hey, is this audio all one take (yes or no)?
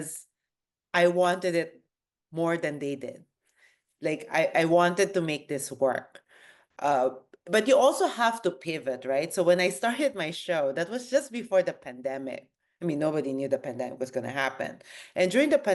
yes